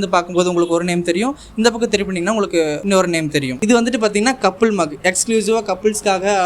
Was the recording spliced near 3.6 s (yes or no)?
yes